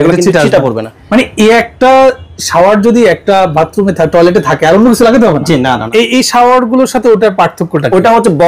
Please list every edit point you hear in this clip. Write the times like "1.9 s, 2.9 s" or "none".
0.9 s, 5.8 s